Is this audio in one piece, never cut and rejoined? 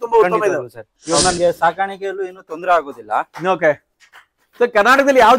no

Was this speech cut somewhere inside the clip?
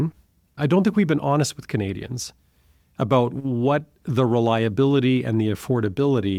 no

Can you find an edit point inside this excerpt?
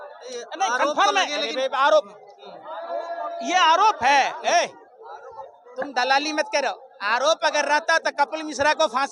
no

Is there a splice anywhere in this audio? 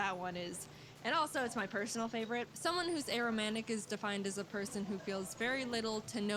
no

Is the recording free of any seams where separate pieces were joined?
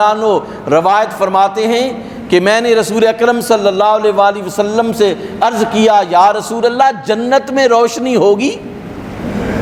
yes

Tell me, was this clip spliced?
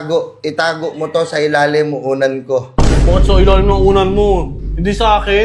no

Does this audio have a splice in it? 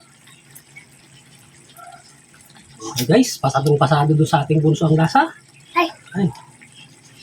yes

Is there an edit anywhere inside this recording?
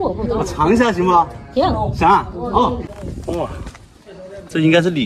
yes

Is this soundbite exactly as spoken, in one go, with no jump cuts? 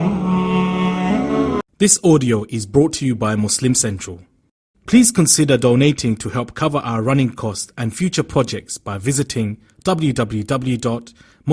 no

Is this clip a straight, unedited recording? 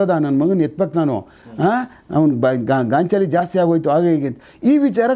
yes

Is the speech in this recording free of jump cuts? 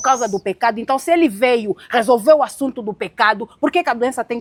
yes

